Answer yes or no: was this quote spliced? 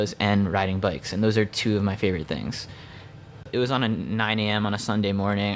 yes